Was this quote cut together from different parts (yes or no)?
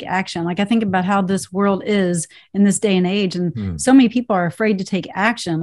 no